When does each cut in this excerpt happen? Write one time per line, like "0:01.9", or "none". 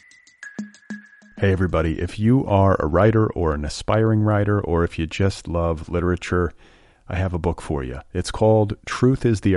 0:00.9